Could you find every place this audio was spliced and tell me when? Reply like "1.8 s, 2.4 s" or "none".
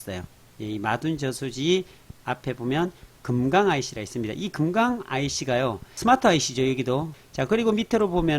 7.2 s

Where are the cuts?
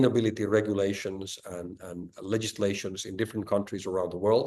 none

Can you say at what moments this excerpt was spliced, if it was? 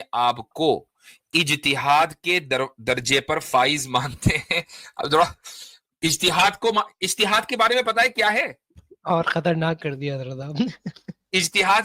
none

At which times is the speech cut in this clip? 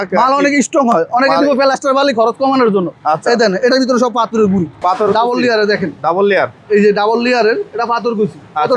4.7 s

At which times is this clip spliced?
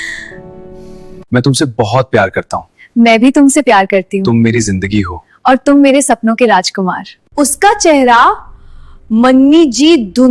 none

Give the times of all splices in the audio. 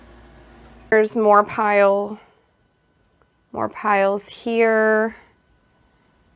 0.9 s

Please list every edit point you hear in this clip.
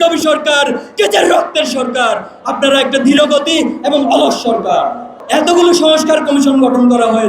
5.2 s

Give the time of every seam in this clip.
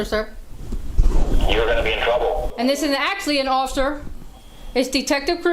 2.5 s

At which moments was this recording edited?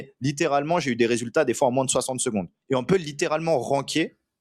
2.5 s

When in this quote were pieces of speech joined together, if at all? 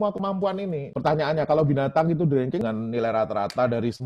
2.6 s

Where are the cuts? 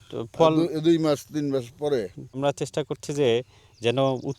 2.2 s

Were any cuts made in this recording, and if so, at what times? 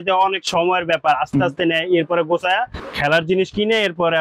2.8 s

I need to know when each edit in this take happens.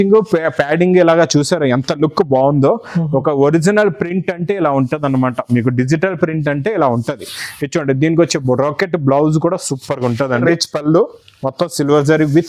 10.4 s

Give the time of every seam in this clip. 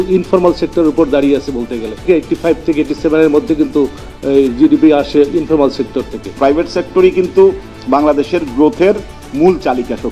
2.0 s, 6.3 s

